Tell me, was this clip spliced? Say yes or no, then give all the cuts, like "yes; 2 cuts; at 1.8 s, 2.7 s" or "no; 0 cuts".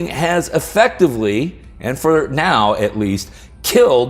no; 0 cuts